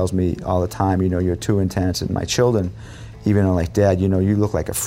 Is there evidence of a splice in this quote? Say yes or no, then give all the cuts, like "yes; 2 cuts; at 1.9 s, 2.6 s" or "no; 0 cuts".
no; 0 cuts